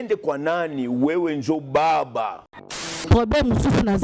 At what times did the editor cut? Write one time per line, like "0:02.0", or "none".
0:02.8